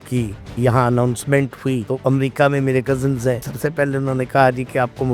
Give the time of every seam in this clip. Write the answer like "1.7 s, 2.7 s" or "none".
1.8 s, 3.5 s